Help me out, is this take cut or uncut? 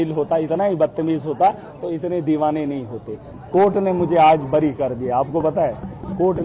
uncut